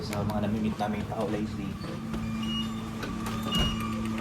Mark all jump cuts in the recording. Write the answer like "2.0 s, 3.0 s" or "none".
none